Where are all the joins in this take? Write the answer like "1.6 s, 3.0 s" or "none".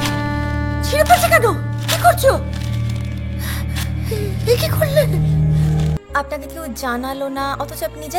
6.0 s